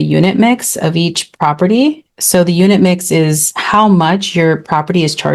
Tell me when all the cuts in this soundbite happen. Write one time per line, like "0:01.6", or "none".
none